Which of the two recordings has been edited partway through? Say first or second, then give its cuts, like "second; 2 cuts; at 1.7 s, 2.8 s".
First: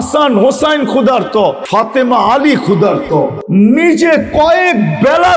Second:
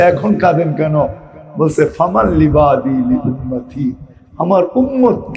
first; 2 cuts; at 1.6 s, 3.4 s